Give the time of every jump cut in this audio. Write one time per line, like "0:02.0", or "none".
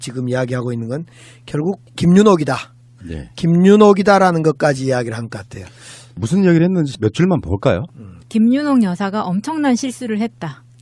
0:03.5